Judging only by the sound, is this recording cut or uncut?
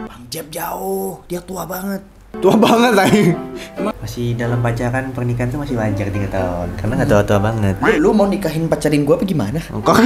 cut